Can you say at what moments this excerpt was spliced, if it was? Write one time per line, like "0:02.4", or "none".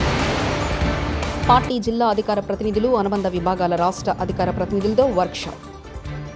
0:01.4

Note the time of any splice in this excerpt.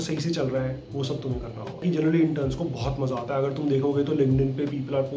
0:01.8

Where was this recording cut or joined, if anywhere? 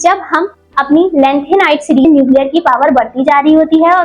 0:02.0

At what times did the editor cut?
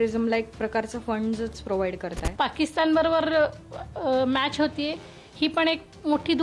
0:02.2

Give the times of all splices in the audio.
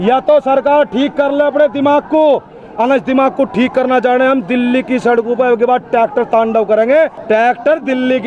0:07.2

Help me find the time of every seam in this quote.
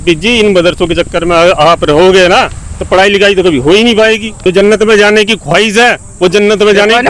0:04.3

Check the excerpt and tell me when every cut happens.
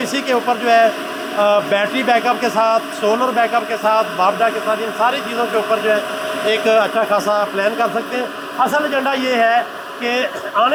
none

